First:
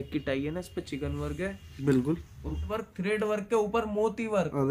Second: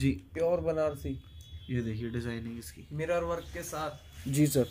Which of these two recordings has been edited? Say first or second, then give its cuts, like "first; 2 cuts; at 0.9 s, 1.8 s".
first; 1 cut; at 2.7 s